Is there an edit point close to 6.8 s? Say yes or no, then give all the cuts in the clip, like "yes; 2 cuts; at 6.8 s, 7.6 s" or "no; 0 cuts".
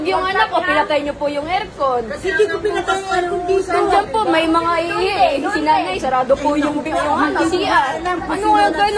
no; 0 cuts